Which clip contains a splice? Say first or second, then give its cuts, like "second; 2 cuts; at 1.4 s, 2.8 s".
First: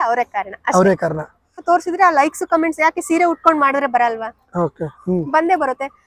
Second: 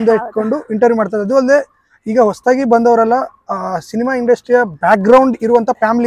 first; 1 cut; at 1.6 s